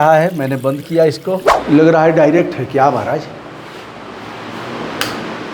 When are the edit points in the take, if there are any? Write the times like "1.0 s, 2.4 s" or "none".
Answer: 1.5 s